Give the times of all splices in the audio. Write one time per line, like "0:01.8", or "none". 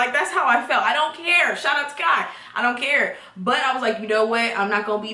none